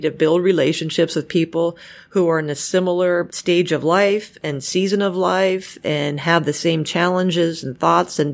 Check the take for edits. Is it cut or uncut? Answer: uncut